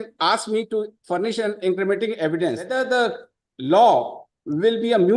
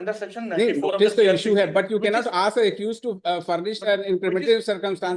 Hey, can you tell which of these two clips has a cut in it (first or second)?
first